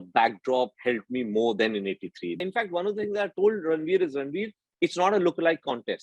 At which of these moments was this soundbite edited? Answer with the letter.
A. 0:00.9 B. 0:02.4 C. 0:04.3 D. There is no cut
B